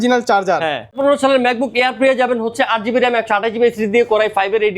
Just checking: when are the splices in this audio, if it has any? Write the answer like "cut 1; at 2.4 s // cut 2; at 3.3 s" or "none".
cut 1; at 1.0 s